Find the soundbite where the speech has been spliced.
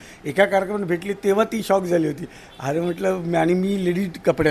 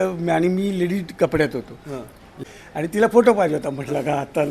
second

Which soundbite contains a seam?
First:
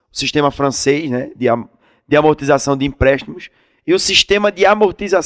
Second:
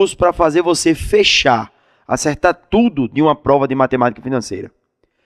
first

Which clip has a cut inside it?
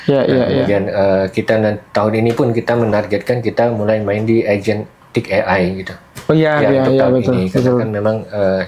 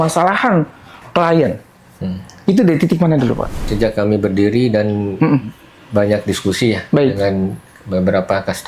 second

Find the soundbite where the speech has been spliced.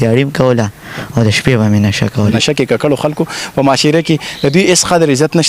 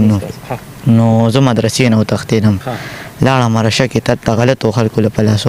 first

